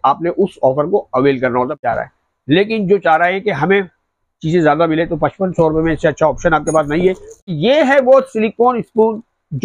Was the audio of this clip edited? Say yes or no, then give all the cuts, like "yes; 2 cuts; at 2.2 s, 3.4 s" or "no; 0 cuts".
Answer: yes; 2 cuts; at 1.7 s, 7.5 s